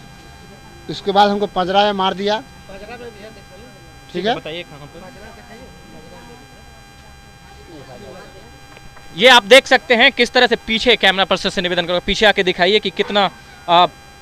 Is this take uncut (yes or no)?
yes